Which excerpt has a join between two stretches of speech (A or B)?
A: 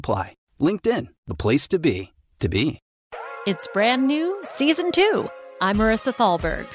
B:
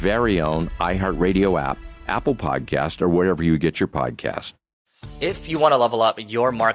A